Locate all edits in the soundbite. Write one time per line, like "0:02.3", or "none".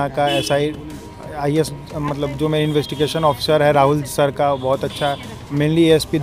none